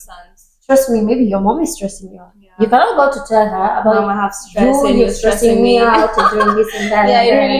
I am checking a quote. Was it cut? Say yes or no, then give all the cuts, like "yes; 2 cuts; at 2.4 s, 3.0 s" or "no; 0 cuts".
no; 0 cuts